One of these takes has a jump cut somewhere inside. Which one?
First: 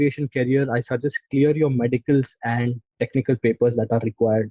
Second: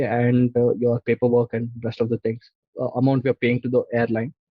second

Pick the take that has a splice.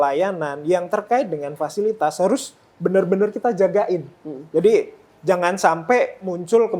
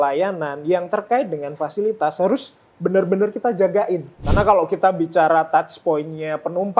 second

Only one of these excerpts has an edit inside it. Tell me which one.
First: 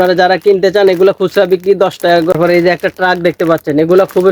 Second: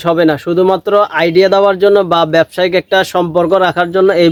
first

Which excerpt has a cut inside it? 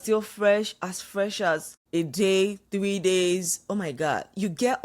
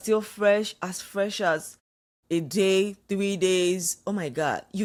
first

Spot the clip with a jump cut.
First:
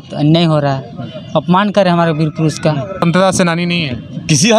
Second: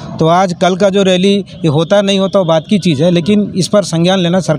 first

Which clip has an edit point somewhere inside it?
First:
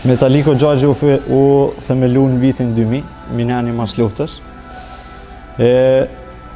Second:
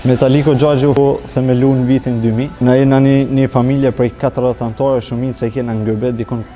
second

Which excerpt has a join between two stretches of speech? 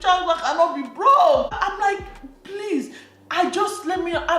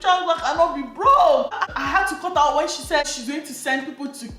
second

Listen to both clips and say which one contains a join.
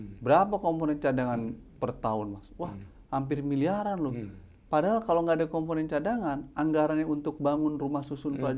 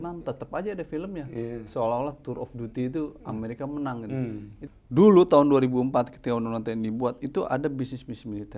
second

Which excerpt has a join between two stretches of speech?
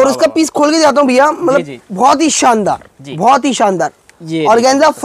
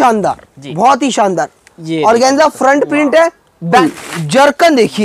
second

